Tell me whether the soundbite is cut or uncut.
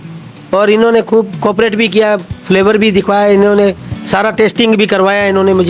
uncut